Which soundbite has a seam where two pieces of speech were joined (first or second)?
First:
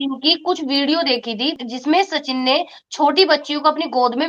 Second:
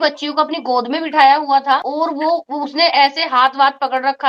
first